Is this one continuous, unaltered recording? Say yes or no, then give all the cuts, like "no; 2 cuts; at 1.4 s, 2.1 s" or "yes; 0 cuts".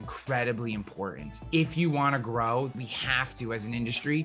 no; 2 cuts; at 1.4 s, 2.7 s